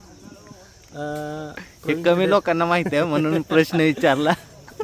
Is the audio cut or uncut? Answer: uncut